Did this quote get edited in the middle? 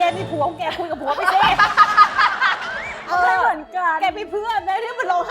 yes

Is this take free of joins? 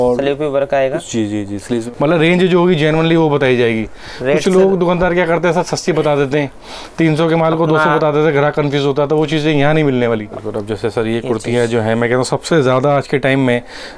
no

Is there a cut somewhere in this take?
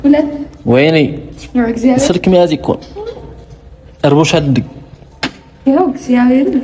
no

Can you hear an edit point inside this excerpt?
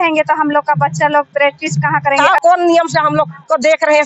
yes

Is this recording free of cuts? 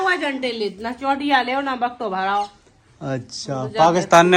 yes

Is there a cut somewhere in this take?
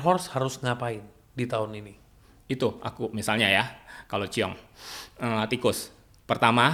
no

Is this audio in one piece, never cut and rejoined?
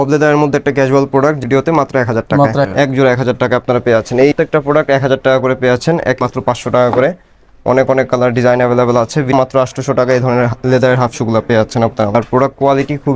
no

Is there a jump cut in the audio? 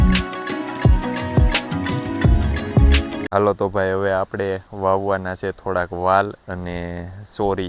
yes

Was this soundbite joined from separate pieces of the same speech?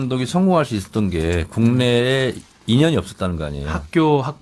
yes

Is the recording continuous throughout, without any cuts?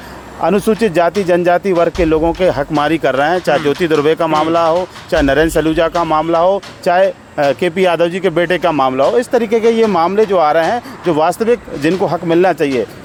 yes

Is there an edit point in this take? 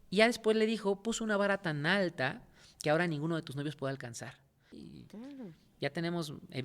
yes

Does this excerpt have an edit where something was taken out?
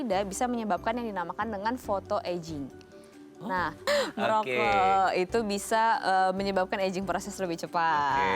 yes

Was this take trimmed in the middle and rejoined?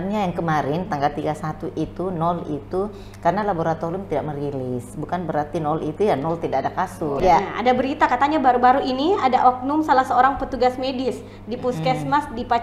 yes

